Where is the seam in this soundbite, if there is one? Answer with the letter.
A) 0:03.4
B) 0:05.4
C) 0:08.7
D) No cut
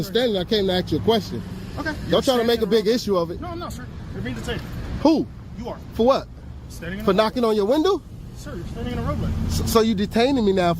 A